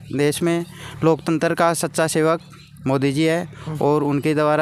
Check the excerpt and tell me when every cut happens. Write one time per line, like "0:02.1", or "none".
none